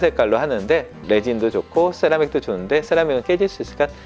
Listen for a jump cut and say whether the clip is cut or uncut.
cut